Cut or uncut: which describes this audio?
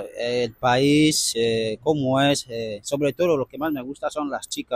uncut